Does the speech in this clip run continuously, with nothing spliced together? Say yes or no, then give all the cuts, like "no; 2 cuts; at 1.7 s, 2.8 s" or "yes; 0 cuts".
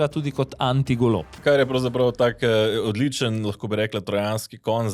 no; 1 cut; at 1.4 s